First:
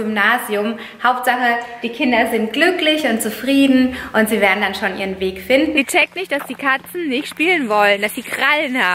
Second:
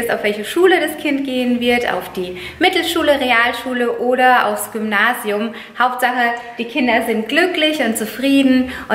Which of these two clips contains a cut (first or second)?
first